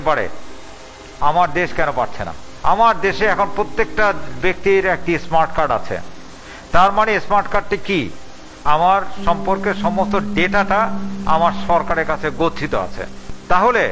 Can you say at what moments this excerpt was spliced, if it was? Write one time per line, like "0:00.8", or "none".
none